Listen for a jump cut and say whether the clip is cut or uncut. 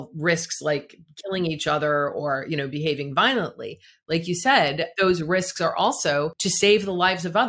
cut